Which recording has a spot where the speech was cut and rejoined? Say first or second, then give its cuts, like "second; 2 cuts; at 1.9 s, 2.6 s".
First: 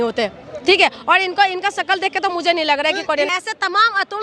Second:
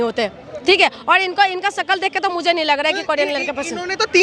first; 1 cut; at 3.3 s